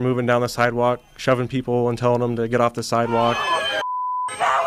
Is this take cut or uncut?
uncut